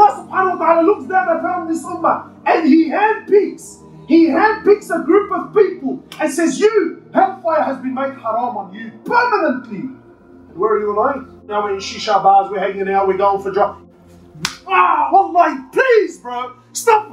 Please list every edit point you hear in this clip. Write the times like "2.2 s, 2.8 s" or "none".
11.5 s, 13.7 s